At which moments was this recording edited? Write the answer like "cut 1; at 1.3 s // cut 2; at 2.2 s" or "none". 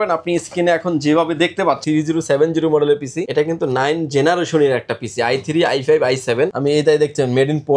cut 1; at 1.8 s // cut 2; at 3.2 s // cut 3; at 6.6 s